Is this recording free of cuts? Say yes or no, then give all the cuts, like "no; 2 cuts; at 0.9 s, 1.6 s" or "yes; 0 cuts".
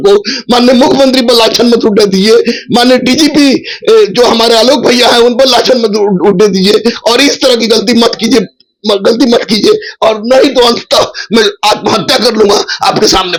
yes; 0 cuts